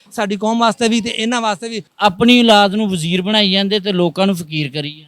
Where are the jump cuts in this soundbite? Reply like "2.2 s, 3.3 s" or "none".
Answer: 1.8 s